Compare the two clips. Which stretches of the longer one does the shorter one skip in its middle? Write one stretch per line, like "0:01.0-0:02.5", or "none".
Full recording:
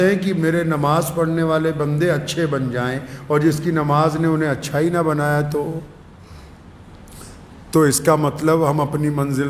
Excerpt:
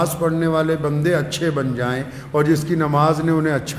none